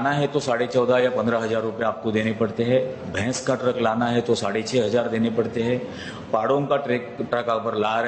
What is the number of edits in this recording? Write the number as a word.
zero